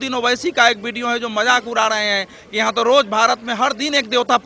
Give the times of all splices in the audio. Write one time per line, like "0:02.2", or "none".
none